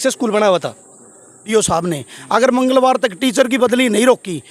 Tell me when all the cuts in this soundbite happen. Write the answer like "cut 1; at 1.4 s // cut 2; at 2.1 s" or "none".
cut 1; at 1.5 s